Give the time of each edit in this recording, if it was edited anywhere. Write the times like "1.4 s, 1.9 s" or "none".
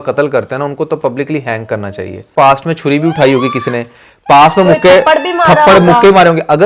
2.3 s